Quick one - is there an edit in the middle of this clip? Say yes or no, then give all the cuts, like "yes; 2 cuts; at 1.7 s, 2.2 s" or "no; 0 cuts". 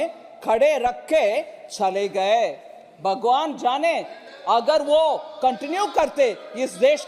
no; 0 cuts